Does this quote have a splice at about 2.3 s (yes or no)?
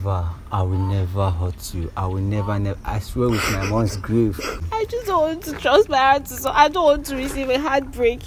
no